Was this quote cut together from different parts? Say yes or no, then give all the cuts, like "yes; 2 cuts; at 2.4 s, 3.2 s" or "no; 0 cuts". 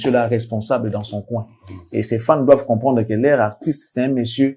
no; 0 cuts